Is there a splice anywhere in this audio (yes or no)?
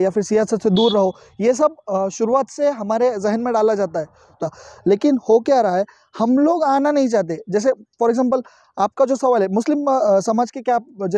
yes